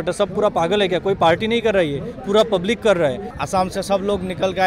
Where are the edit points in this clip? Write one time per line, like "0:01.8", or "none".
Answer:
0:03.3

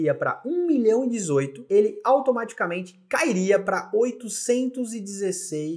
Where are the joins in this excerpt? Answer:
0:01.6

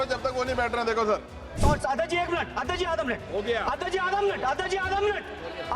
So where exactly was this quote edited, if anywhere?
0:01.6

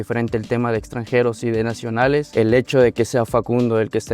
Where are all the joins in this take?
0:02.3

